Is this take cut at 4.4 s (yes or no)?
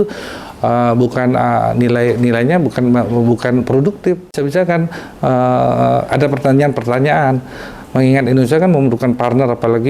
yes